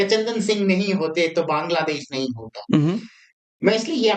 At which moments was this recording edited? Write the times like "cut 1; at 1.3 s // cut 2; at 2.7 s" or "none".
none